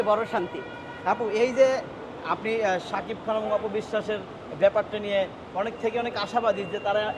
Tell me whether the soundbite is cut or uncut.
uncut